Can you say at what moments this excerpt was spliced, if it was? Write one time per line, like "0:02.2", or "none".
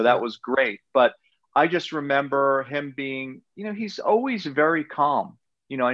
none